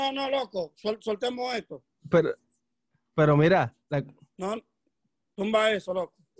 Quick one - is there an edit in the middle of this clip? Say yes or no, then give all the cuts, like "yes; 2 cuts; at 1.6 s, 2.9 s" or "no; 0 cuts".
yes; 1 cut; at 3.8 s